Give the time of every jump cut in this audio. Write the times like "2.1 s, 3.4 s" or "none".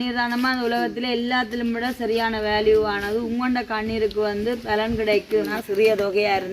5.6 s